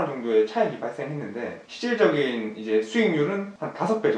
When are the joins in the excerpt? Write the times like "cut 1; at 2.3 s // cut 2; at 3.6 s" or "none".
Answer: cut 1; at 1.6 s

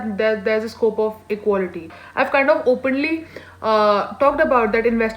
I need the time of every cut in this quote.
cut 1; at 2.0 s

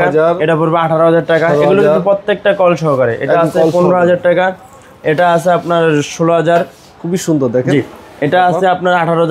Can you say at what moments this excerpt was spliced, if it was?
none

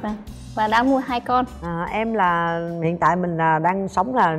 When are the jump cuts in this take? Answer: none

